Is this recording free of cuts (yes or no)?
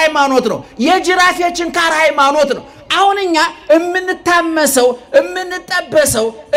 yes